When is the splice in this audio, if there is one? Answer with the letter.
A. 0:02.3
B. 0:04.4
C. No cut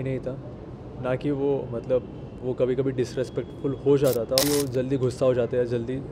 B